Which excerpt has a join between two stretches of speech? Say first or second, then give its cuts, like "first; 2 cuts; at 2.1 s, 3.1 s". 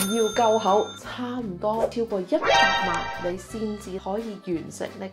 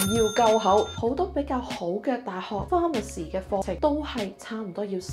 first; 1 cut; at 0.9 s